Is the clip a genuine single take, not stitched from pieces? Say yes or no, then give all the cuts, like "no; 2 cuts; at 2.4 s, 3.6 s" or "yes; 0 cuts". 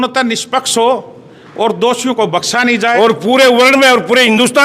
no; 1 cut; at 2.9 s